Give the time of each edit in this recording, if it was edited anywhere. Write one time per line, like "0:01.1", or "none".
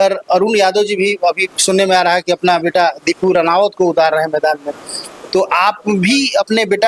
none